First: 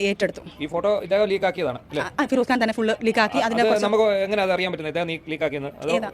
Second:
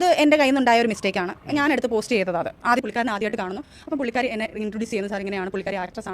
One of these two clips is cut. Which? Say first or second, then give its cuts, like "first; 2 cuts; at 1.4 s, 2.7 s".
second; 1 cut; at 2.8 s